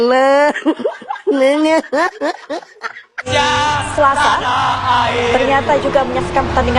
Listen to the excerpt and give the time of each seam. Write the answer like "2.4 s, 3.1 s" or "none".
3.3 s

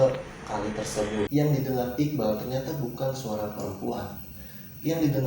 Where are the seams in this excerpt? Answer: 1.3 s

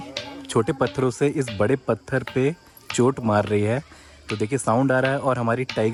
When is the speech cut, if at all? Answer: none

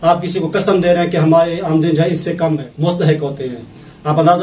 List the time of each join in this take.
2.7 s

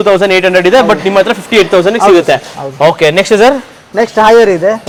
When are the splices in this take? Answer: none

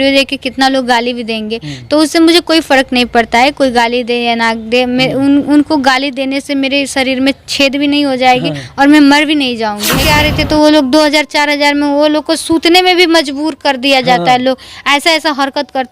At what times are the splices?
9.9 s

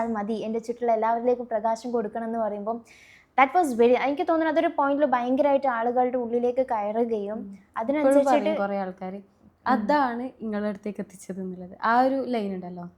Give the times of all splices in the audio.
none

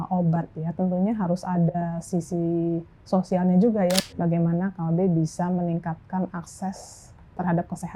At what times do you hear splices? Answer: 4.0 s

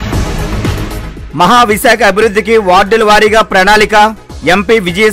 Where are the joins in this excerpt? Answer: 0.9 s

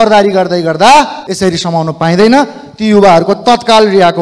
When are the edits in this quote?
1.2 s

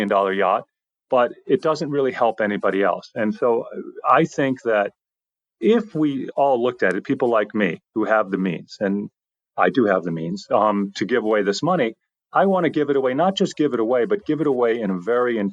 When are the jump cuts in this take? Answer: none

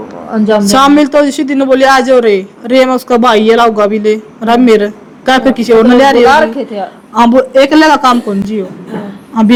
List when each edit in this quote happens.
none

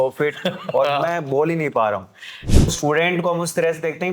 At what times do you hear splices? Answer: 2.7 s

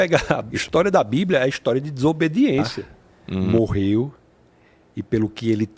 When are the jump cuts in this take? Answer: 3.4 s

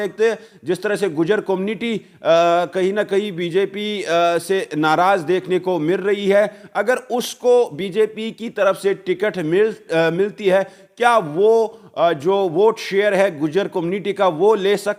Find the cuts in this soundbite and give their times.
none

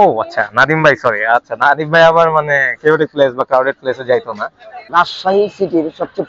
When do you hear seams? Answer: 4.7 s

